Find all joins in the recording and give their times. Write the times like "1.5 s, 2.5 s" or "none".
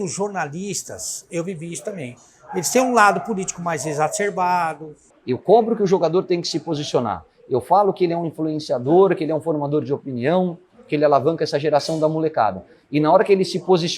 1.2 s, 5.1 s